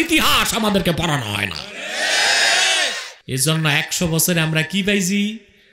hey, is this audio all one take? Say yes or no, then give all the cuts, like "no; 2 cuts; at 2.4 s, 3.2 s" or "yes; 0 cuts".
no; 1 cut; at 3.1 s